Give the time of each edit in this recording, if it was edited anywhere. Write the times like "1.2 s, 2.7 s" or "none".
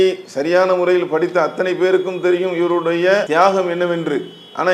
3.3 s